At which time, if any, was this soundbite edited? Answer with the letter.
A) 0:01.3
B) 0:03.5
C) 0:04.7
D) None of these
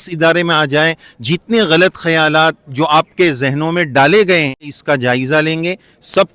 C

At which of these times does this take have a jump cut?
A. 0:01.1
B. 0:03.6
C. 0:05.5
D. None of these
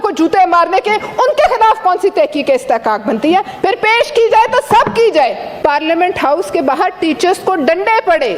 C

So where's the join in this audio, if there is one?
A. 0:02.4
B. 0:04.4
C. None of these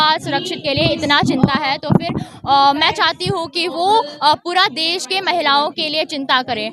C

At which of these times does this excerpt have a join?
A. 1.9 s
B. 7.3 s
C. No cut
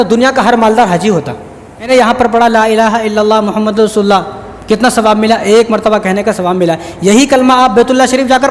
A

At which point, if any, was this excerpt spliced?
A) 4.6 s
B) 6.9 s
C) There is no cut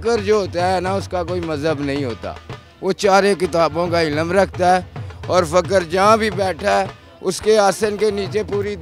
C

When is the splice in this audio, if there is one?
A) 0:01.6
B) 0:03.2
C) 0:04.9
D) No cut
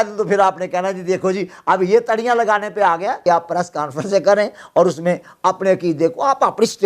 B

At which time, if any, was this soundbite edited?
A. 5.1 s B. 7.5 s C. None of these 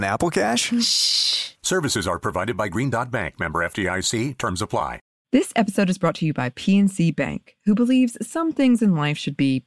A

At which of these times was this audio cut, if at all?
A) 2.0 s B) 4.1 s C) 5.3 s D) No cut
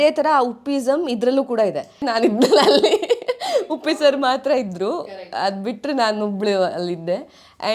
A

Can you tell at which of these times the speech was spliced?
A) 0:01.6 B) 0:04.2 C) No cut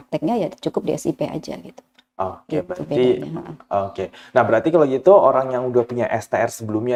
C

